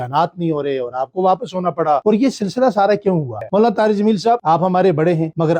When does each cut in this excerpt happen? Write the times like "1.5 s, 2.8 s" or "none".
3.3 s